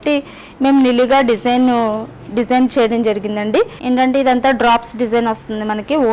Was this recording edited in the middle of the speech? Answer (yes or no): yes